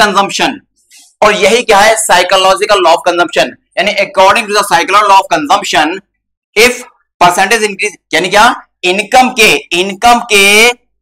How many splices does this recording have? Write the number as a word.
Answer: zero